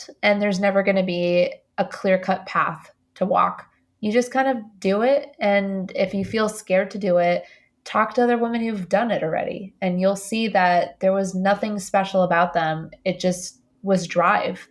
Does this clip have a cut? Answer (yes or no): no